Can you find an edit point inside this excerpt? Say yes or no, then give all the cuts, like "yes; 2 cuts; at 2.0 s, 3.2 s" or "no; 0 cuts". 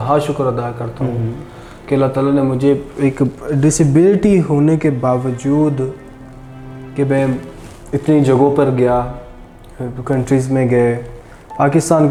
no; 0 cuts